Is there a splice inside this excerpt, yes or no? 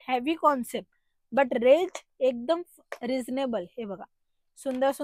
no